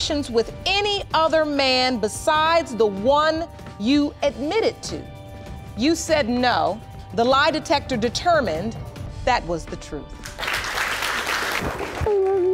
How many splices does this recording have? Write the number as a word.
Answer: one